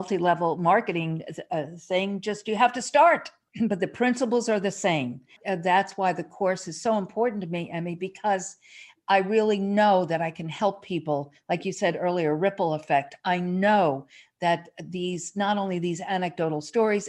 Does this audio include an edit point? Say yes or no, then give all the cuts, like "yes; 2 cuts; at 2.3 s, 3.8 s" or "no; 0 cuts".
yes; 2 cuts; at 3.4 s, 5.4 s